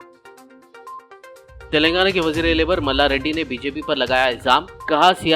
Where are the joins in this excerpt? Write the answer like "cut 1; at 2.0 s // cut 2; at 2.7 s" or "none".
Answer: cut 1; at 1.1 s